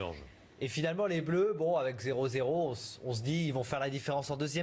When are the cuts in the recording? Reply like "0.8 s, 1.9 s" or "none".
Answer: 2.9 s